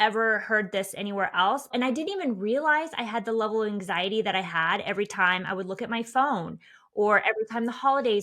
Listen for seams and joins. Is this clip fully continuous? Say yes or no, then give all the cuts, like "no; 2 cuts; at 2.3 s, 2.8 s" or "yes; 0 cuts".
no; 1 cut; at 1.7 s